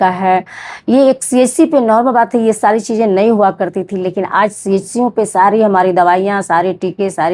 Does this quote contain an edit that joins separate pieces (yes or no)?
no